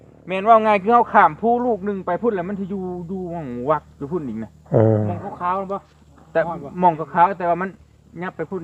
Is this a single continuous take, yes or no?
yes